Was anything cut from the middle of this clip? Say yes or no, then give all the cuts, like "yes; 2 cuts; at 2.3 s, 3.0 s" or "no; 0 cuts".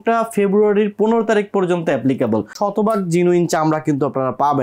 yes; 1 cut; at 2.5 s